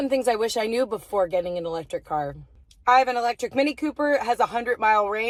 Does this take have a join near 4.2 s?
no; 0 cuts

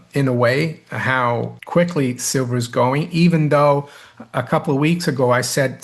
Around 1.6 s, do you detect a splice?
yes; 1 cut; at 1.6 s

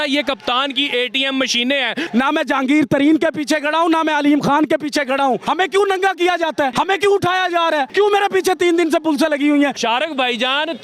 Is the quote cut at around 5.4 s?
yes; 5 cuts; at 2.0 s, 5.4 s, 6.7 s, 7.9 s, 9.8 s

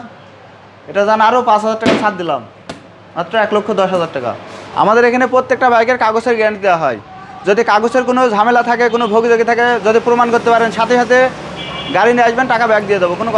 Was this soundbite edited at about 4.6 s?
yes; 1 cut; at 4.6 s

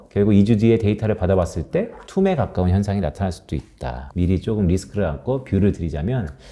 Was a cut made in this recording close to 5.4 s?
no; 2 cuts; at 2.0 s, 4.0 s

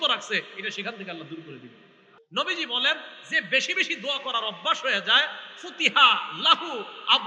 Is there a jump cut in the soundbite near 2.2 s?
yes; 1 cut; at 2.2 s

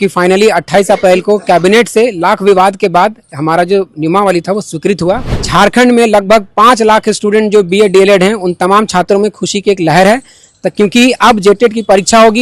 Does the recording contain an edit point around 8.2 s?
no; 1 cut; at 5.3 s

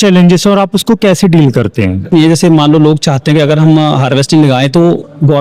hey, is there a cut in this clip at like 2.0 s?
yes; 1 cut; at 2.0 s

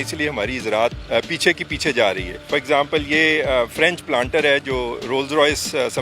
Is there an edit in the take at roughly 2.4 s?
yes; 2 cuts; at 1.0 s, 2.4 s

